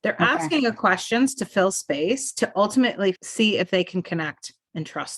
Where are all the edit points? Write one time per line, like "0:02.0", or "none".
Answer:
0:03.2